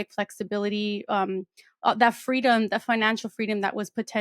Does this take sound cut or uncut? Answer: uncut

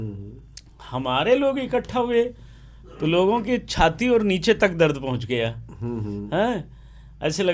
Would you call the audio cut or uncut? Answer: uncut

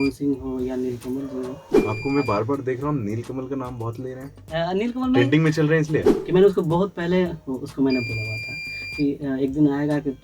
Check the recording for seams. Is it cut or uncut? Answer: cut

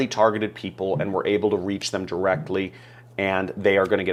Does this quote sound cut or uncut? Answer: uncut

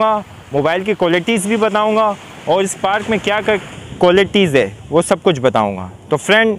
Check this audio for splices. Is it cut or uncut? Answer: uncut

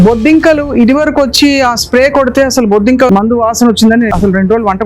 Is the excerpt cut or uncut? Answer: cut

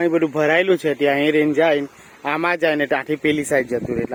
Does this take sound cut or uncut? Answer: uncut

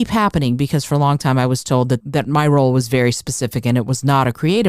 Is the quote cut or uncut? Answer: cut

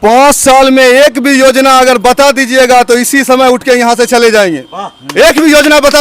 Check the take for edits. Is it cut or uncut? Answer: uncut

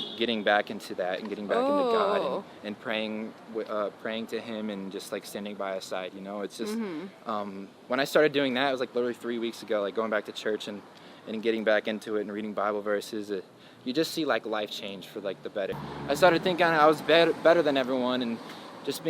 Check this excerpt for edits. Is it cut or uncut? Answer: cut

